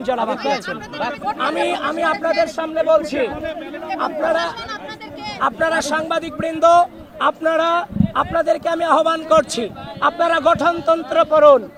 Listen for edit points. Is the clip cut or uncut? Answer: uncut